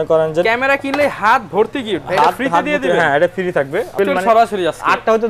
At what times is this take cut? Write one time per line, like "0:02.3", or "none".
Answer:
0:04.0